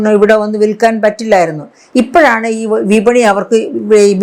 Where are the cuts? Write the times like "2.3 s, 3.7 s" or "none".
none